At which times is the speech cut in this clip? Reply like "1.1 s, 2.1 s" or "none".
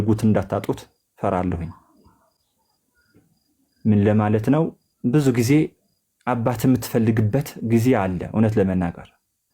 none